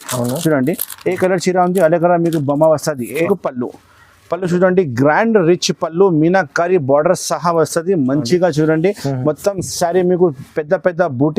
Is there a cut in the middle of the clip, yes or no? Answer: yes